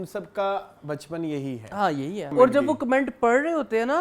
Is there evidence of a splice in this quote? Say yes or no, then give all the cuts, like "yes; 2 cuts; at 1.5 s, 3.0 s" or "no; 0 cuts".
yes; 1 cut; at 2.3 s